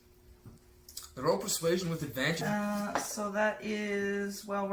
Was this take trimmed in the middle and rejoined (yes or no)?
yes